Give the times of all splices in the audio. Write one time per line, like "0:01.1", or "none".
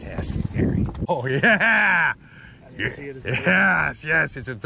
0:01.0